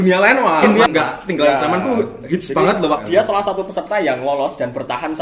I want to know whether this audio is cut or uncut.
cut